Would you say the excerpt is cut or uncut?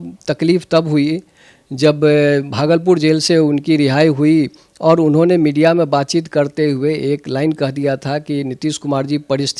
uncut